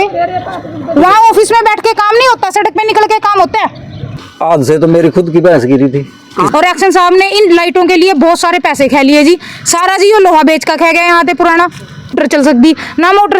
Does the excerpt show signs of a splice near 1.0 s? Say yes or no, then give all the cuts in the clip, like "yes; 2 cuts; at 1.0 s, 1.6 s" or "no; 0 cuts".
no; 3 cuts; at 4.2 s, 6.5 s, 12.1 s